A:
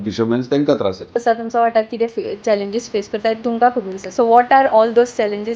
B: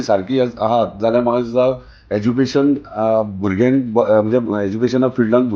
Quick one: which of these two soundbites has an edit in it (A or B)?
A